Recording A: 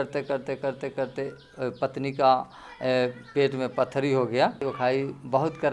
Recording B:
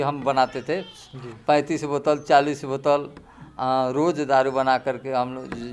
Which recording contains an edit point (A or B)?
A